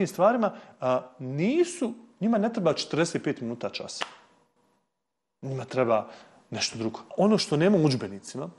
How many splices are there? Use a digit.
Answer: 1